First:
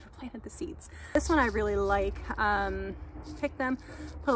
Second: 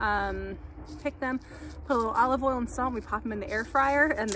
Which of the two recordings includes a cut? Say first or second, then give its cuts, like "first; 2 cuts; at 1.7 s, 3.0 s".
first; 1 cut; at 1.1 s